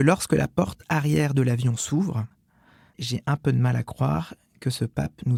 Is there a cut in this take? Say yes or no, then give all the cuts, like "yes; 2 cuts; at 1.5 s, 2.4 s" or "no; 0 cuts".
no; 0 cuts